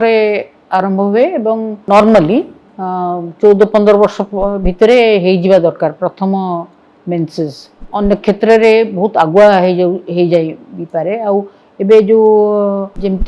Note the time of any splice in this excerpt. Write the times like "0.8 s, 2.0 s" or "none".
1.8 s, 7.9 s